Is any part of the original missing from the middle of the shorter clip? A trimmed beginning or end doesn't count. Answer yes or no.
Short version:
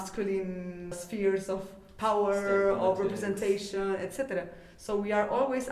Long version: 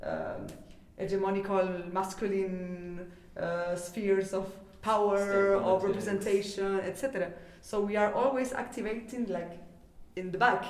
yes